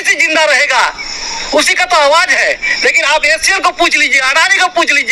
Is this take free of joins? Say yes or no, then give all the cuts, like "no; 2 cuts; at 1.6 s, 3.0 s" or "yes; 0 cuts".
yes; 0 cuts